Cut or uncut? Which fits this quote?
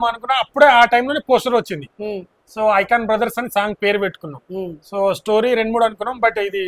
uncut